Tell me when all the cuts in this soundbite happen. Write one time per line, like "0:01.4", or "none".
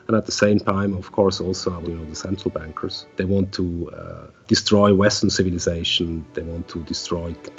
0:01.8
0:03.0
0:04.4